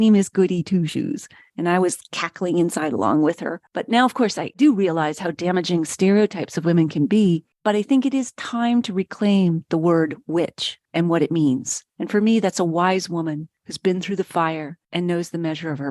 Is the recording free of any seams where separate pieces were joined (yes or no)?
no